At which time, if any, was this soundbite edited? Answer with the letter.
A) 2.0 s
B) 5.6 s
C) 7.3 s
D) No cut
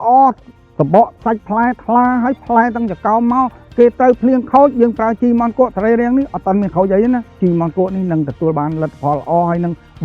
C